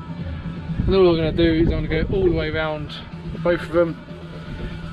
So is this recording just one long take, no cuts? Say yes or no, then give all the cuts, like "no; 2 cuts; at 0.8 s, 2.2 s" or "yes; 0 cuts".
yes; 0 cuts